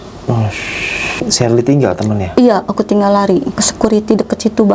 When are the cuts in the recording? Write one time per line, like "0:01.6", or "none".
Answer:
0:01.2
0:03.6